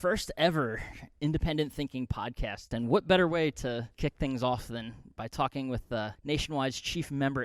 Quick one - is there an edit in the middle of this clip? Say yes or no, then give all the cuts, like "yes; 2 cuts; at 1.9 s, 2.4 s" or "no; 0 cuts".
yes; 3 cuts; at 2.7 s, 3.9 s, 6.2 s